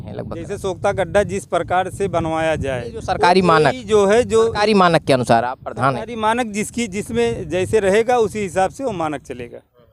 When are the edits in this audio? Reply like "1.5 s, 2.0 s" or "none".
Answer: none